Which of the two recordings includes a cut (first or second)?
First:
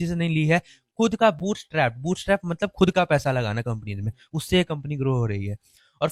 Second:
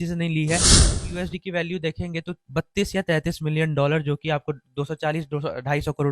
second